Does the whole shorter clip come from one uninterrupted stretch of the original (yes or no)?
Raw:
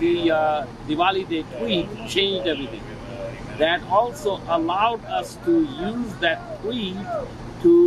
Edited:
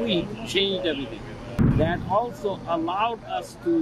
no